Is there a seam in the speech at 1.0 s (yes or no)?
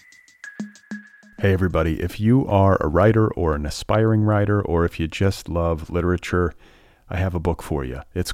yes